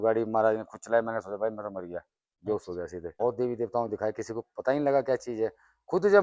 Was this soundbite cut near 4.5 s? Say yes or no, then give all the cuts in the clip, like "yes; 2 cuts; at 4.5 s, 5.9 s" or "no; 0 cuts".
no; 1 cut; at 3.1 s